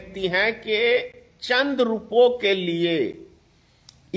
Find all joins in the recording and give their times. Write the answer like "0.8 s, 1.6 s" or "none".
none